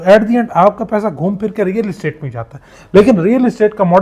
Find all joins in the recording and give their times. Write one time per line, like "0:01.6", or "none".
none

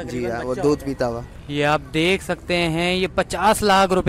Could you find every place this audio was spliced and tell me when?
0:01.3

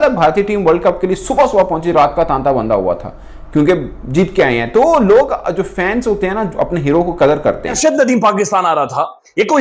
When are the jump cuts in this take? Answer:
0:07.8

